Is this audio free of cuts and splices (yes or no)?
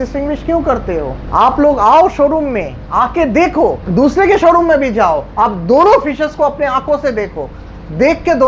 no